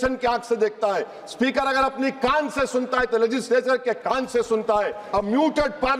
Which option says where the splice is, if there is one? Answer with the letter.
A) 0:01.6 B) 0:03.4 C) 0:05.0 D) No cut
C